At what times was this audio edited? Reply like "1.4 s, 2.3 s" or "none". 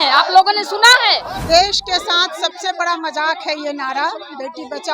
1.4 s